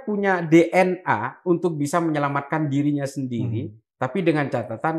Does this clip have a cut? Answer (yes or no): no